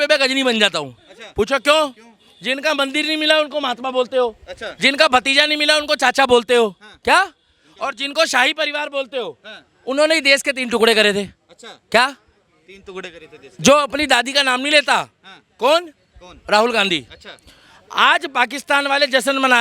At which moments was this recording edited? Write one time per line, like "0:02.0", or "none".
none